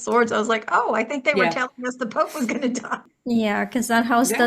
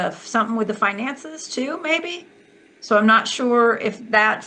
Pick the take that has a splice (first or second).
first